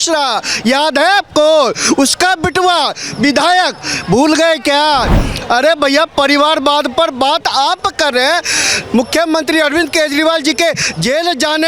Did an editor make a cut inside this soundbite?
no; 0 cuts

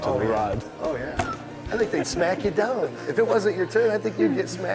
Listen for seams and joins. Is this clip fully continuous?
yes; 0 cuts

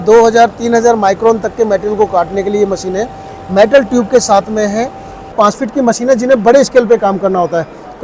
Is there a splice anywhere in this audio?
yes; 1 cut; at 5.3 s

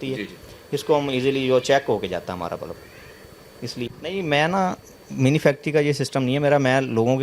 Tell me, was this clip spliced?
yes; 1 cut; at 3.8 s

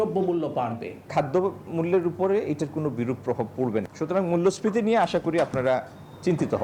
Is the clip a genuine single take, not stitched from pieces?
no; 1 cut; at 1.1 s

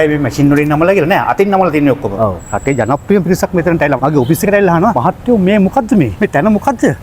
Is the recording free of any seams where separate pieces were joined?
no; 4 cuts; at 2.5 s, 4.0 s, 5.0 s, 6.1 s

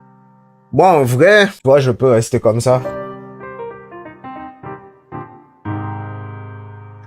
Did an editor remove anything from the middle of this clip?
yes; 1 cut; at 1.6 s

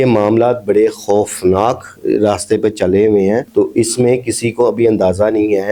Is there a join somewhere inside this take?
no; 0 cuts

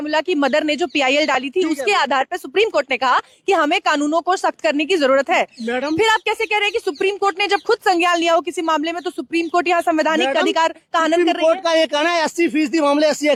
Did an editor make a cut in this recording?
no; 0 cuts

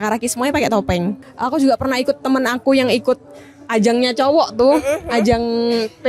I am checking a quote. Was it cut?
yes; 1 cut; at 1.3 s

